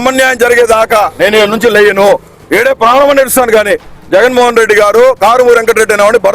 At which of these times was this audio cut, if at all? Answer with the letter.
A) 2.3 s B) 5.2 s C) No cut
A